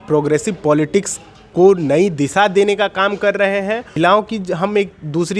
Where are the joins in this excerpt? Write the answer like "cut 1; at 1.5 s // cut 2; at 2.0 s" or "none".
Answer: cut 1; at 3.9 s